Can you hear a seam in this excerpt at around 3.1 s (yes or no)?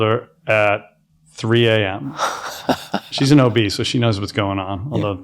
yes